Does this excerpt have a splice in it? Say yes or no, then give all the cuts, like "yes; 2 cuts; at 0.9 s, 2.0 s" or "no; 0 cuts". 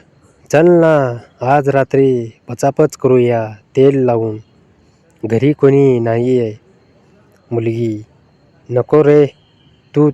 no; 0 cuts